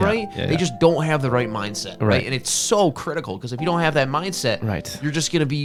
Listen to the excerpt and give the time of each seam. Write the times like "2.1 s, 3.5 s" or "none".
none